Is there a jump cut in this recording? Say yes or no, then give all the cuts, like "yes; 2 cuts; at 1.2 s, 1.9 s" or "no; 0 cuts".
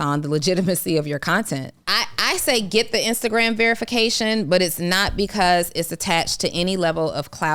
yes; 1 cut; at 1.8 s